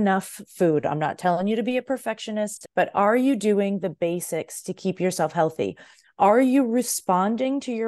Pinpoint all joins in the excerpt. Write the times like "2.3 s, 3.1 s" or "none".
2.6 s